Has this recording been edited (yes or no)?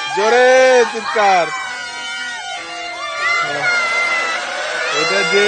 no